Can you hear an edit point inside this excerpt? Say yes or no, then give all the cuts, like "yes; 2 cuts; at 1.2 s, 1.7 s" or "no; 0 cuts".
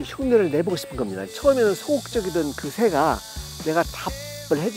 yes; 1 cut; at 1.2 s